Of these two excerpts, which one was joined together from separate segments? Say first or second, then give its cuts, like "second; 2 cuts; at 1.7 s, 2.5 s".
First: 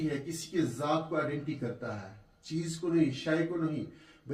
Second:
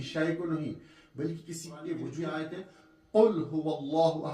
second; 1 cut; at 2.2 s